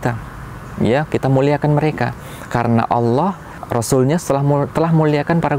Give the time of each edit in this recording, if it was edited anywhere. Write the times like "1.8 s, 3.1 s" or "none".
3.5 s